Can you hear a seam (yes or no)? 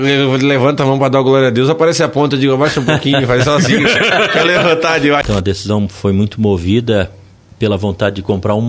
yes